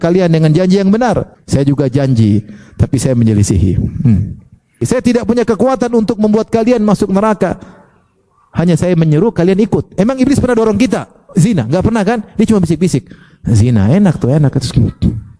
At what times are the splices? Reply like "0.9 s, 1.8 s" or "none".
1.3 s, 4.8 s